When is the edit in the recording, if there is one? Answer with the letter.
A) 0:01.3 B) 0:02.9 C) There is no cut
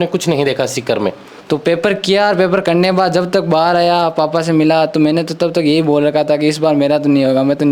A